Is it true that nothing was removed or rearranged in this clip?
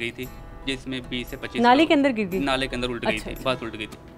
yes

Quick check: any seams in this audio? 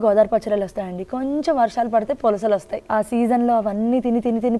yes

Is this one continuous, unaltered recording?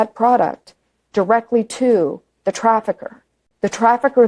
yes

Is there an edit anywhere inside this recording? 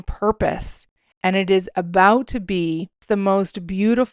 yes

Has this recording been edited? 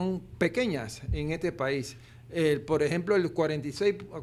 no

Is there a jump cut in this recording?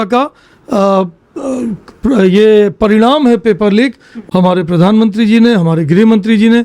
yes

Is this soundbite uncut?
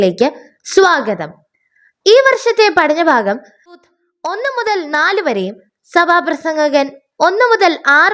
no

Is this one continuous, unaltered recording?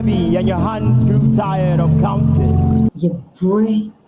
no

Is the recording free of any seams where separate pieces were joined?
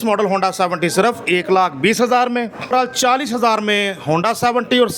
no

